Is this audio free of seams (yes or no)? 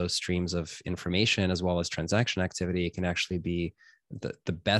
yes